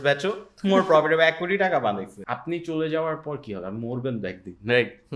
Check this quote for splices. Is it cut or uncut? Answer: cut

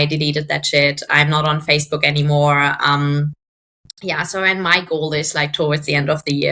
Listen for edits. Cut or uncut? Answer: uncut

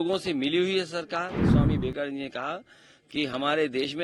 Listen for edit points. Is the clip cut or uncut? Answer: cut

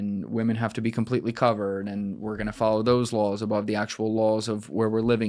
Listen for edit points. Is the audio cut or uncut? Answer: uncut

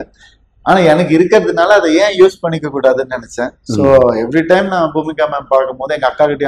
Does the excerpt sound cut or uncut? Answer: uncut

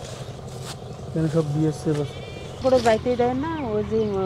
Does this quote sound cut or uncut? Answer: cut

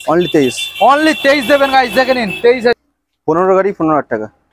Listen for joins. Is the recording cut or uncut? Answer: cut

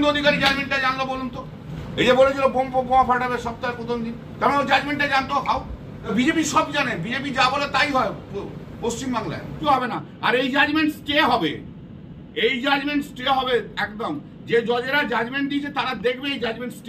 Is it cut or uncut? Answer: cut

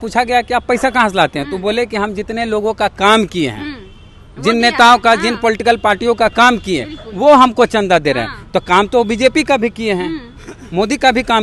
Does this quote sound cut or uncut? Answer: uncut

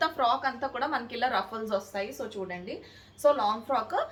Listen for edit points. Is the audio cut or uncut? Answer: uncut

